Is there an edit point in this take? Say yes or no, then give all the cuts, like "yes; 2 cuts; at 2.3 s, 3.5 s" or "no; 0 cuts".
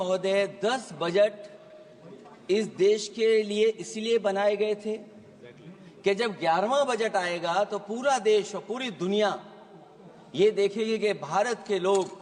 no; 0 cuts